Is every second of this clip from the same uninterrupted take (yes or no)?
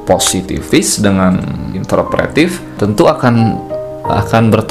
no